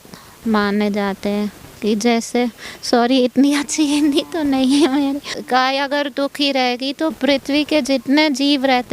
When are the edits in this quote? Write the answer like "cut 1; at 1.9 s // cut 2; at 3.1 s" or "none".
cut 1; at 5.4 s // cut 2; at 7.2 s